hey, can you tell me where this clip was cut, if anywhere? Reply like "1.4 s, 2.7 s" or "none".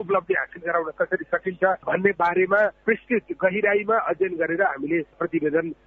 none